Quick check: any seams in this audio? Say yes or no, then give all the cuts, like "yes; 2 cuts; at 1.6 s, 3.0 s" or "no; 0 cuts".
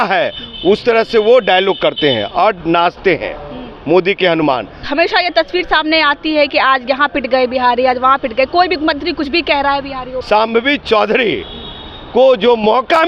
yes; 2 cuts; at 4.8 s, 10.1 s